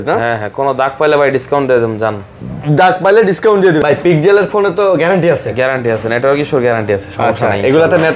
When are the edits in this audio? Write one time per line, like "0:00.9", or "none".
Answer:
0:03.8